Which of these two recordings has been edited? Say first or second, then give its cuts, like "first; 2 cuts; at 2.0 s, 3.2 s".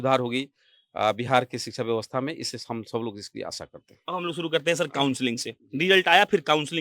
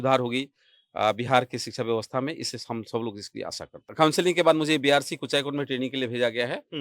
second; 1 cut; at 3.9 s